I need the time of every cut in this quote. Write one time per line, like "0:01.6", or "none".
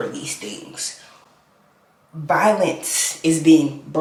none